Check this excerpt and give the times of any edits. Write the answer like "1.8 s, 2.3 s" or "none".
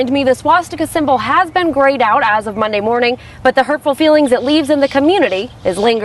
none